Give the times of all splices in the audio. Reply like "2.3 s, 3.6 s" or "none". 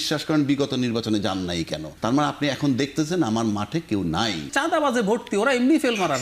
1.9 s, 4.5 s